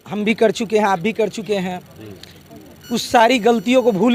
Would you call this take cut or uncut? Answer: uncut